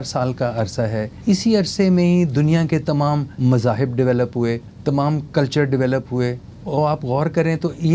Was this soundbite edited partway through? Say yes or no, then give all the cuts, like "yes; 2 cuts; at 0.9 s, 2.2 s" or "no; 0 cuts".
yes; 4 cuts; at 1.1 s, 3.3 s, 4.7 s, 6.5 s